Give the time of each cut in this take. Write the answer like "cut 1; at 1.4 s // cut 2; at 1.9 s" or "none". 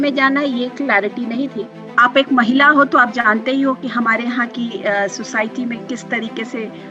cut 1; at 1.7 s